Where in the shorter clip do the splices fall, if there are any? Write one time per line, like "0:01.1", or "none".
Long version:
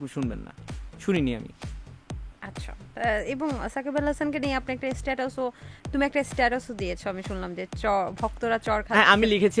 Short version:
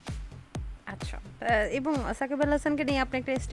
none